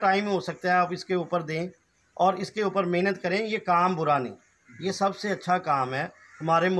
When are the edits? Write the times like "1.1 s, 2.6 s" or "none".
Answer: none